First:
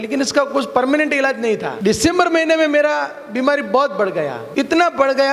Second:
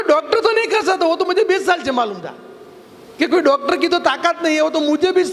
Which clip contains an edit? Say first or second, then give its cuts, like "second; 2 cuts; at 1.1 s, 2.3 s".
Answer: first; 2 cuts; at 1.7 s, 4.4 s